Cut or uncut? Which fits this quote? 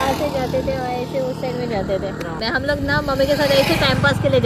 uncut